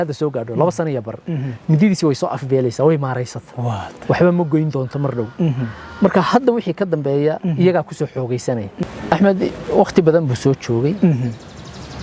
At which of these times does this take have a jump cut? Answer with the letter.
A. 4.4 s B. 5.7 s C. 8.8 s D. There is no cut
C